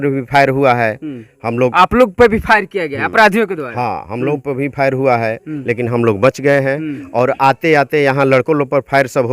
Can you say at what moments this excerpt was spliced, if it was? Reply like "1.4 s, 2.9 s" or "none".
none